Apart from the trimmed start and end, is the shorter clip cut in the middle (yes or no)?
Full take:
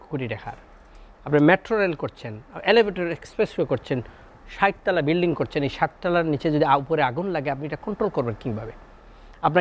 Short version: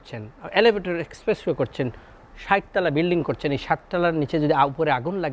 no